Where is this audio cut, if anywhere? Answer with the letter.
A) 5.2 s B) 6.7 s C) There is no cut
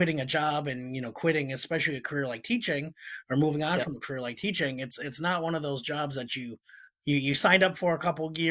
C